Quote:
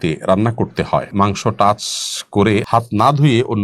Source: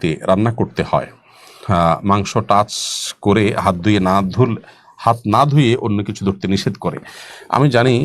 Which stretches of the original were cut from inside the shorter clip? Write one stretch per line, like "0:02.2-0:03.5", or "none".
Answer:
0:01.1-0:02.0
0:03.6-0:05.0